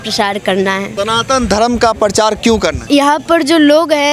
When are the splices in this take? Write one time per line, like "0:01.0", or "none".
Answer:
0:00.9
0:02.8